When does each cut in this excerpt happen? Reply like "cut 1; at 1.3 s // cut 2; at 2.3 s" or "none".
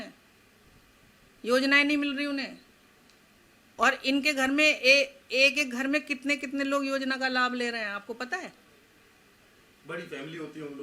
none